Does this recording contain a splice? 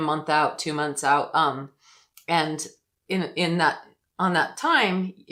no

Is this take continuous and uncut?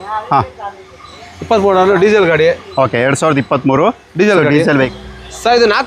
no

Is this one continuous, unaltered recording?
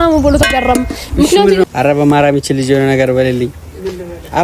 no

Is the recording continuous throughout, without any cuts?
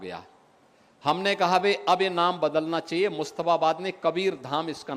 yes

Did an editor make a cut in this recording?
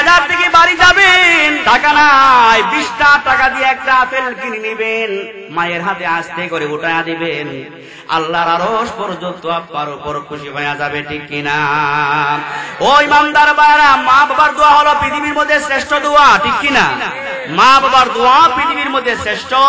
yes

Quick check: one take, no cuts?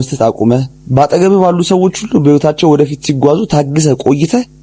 yes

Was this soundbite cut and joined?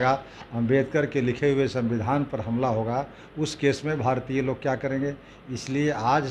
no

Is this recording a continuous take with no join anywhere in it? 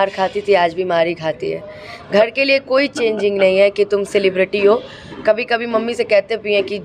yes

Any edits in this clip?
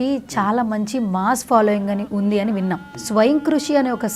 yes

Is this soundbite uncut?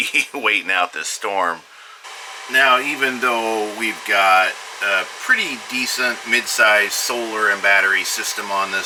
yes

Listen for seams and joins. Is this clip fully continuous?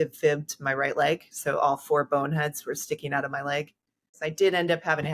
no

